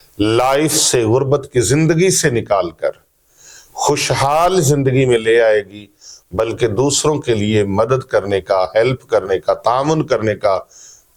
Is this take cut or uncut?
uncut